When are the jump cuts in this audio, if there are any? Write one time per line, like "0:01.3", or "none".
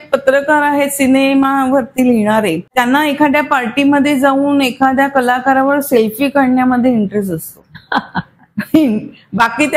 0:02.6